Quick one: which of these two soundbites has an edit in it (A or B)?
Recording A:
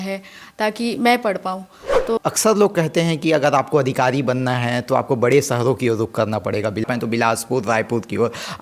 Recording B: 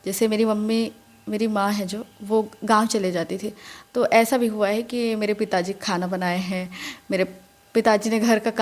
A